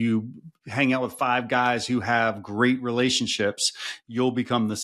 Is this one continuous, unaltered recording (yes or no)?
yes